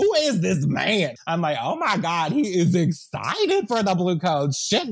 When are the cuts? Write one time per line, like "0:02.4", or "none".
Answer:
0:01.2